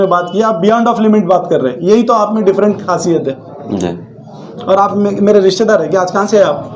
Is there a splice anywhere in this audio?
no; 0 cuts

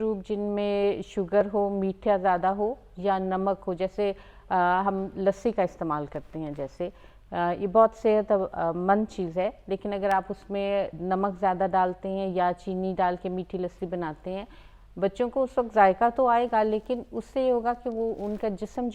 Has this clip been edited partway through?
no; 0 cuts

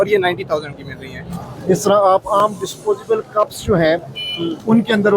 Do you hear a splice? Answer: yes; 1 cut; at 1.4 s

